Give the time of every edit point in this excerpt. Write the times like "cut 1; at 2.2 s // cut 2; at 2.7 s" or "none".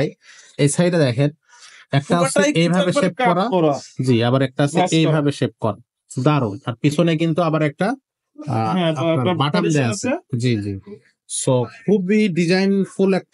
none